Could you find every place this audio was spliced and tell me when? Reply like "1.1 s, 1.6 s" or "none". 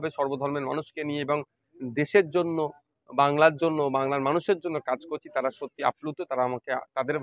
none